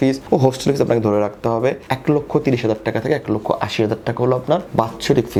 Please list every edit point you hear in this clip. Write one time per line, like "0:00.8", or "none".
none